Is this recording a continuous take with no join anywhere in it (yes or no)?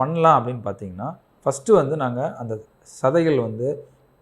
yes